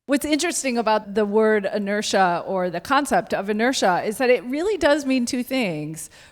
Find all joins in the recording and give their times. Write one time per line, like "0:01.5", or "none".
0:01.1